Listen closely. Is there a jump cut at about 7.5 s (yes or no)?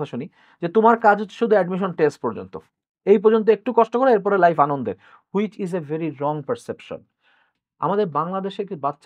yes